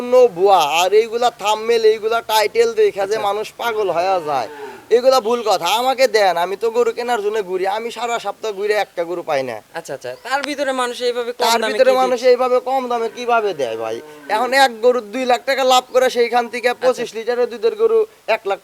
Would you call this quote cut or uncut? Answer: uncut